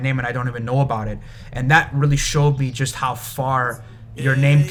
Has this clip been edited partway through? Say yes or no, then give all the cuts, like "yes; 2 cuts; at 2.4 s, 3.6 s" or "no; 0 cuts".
no; 0 cuts